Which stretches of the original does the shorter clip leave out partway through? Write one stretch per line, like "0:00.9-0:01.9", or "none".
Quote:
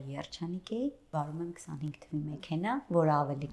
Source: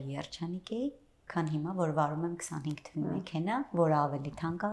0:01.1-0:01.9